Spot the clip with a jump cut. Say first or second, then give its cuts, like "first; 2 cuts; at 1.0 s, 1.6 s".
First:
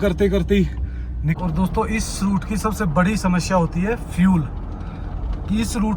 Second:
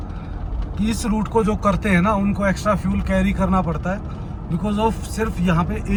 first; 1 cut; at 1.4 s